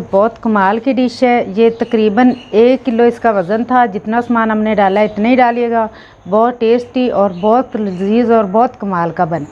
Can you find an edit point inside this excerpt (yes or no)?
no